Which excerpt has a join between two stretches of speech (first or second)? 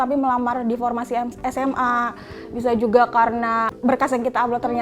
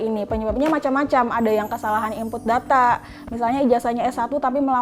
first